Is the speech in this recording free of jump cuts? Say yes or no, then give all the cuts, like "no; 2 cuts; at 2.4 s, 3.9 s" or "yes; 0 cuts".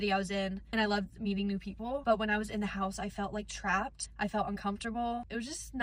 yes; 0 cuts